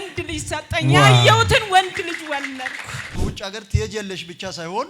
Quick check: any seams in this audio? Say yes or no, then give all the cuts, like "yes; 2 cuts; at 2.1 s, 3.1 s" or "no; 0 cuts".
yes; 1 cut; at 3.2 s